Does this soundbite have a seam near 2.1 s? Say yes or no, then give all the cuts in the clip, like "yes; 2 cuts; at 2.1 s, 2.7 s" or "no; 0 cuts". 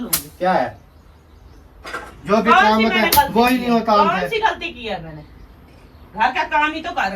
yes; 1 cut; at 2.1 s